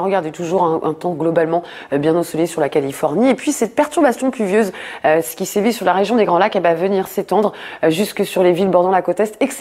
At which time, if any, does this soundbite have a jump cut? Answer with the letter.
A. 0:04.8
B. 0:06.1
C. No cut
B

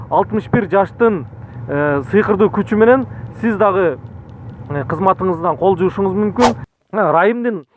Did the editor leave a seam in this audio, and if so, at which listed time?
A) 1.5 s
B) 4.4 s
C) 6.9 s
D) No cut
C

